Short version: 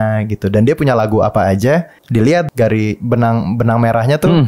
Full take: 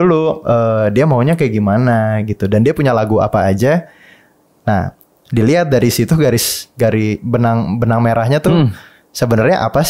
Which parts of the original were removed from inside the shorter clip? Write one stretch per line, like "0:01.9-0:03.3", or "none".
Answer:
0:04.3-0:06.6